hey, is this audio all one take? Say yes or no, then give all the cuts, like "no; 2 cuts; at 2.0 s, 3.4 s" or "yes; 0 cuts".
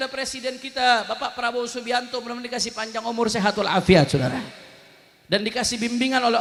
yes; 0 cuts